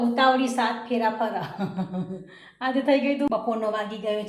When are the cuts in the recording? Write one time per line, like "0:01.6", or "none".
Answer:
0:03.3

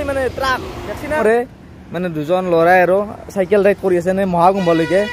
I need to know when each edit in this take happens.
0:01.2

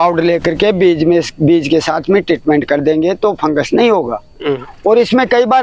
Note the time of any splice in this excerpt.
0:04.5

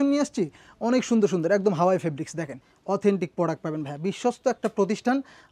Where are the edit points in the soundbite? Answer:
0:02.7

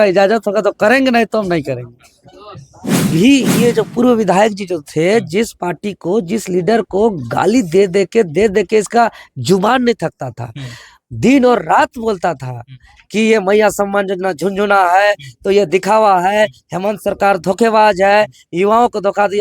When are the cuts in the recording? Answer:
0:03.1

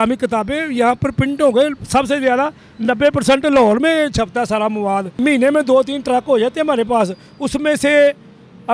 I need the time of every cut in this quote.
0:05.1

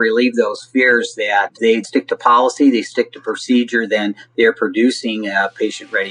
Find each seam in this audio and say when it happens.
0:01.8

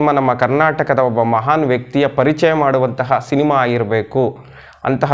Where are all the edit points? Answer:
none

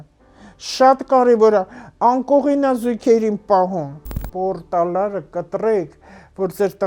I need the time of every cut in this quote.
0:04.2

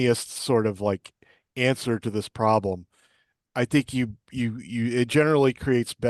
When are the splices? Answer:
none

